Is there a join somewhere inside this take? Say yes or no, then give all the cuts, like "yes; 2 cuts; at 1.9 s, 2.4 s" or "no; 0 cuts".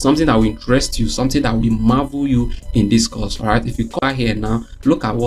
yes; 1 cut; at 4.0 s